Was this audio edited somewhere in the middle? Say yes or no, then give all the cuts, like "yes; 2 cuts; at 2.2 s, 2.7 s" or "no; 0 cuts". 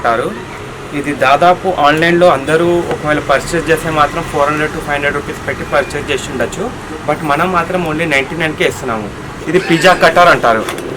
yes; 1 cut; at 9.3 s